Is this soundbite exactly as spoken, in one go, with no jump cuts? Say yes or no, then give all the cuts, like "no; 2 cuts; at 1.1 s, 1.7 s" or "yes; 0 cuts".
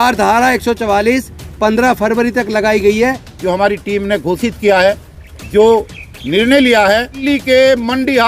no; 2 cuts; at 3.3 s, 7.2 s